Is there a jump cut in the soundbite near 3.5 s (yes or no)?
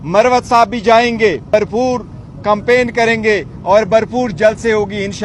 no